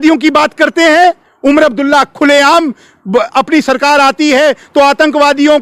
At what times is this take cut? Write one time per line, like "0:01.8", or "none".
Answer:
none